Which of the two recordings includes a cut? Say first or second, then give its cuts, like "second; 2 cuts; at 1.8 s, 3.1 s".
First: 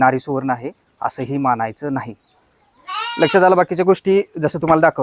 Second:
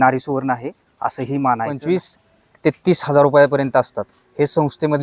second; 1 cut; at 1.8 s